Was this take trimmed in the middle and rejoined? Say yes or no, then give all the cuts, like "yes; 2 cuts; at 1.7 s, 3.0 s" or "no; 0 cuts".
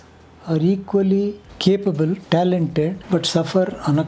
yes; 3 cuts; at 1.5 s, 2.2 s, 3.0 s